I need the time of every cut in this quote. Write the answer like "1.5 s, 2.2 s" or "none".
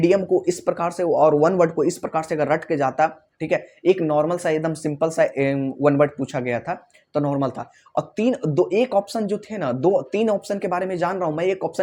none